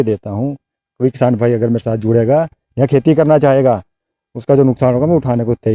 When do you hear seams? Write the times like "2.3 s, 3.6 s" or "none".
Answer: none

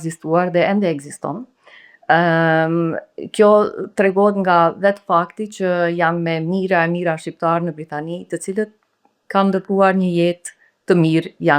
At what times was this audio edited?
none

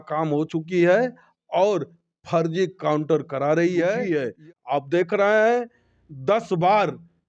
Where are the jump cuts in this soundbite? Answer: 4.0 s

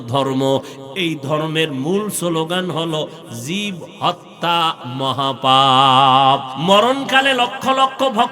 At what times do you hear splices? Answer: 6.5 s

